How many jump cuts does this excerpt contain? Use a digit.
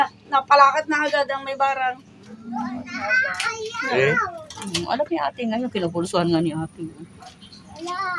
0